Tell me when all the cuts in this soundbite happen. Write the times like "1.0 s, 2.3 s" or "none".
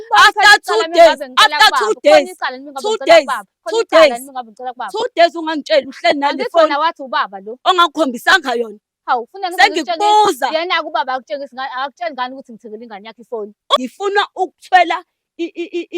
13.8 s